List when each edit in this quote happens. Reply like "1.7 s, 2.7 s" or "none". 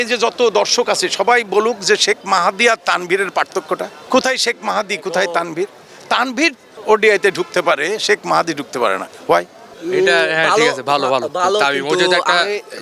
3.9 s, 6.7 s, 9.6 s